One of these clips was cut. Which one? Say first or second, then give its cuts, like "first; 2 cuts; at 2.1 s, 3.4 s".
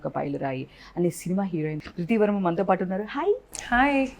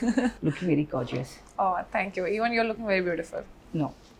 first; 1 cut; at 1.8 s